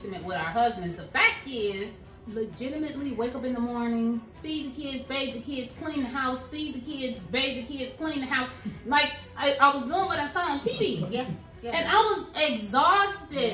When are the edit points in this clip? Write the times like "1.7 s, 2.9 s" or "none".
2.1 s